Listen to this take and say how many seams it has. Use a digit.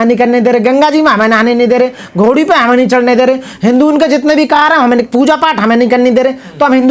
0